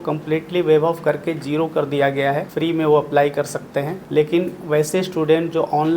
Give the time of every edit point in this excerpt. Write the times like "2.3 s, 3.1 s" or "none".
2.5 s, 4.0 s